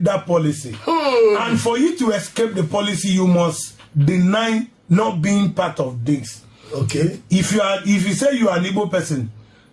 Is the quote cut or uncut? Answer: uncut